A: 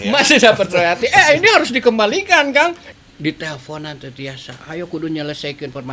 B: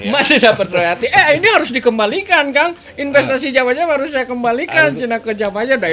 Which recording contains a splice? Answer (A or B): A